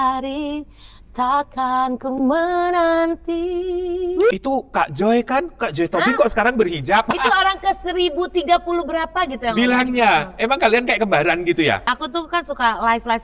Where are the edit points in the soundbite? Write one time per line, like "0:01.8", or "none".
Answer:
0:04.3
0:07.1
0:11.9